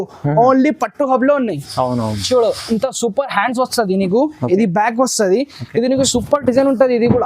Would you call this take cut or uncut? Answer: cut